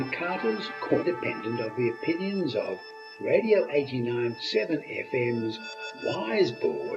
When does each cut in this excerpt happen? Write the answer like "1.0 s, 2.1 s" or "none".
1.0 s